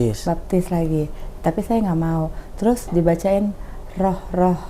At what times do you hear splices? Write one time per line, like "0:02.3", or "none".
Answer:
none

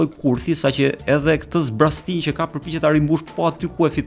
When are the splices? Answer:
none

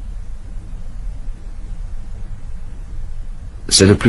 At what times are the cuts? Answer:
none

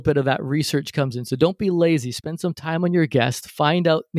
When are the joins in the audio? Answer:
none

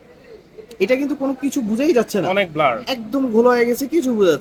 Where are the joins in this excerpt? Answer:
none

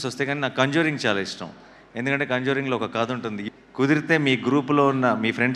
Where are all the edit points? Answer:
0:03.4

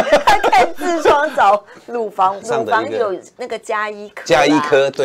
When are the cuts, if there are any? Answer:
0:02.4

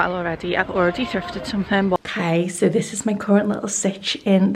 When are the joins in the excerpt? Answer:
0:02.0

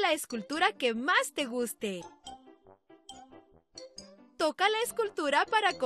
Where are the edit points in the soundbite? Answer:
none

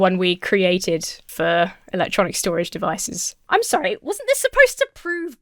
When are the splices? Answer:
none

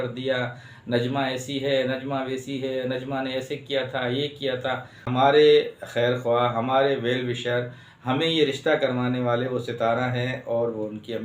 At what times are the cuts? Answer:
0:05.1

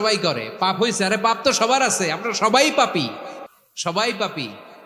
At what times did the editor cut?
none

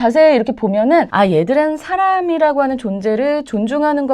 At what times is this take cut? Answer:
0:01.1

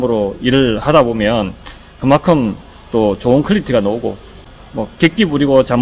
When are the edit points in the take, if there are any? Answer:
0:04.4

